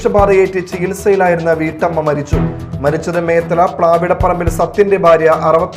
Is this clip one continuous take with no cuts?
yes; 0 cuts

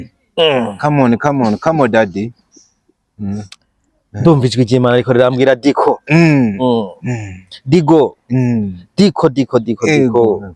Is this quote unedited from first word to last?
yes; 0 cuts

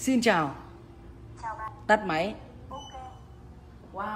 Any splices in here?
yes; 1 cut; at 1.7 s

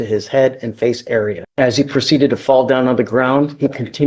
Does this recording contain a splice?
yes; 1 cut; at 1.4 s

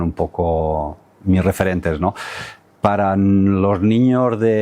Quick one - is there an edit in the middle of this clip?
no; 0 cuts

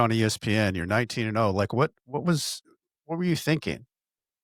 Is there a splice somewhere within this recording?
no; 0 cuts

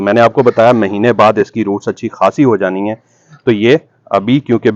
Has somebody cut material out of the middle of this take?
no; 0 cuts

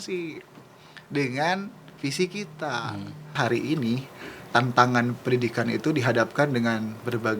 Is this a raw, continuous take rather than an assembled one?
no; 1 cut; at 3.3 s

